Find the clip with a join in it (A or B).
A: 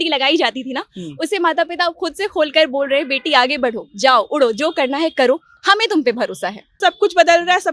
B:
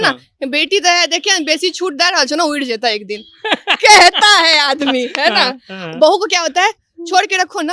A